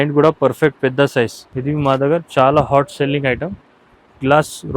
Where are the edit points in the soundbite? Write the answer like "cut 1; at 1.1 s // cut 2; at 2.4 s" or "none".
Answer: cut 1; at 1.5 s